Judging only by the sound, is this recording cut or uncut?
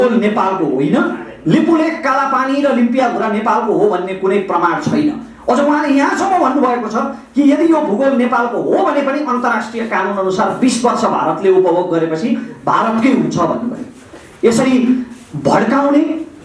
uncut